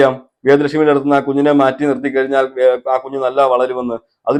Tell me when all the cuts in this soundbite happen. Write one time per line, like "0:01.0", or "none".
none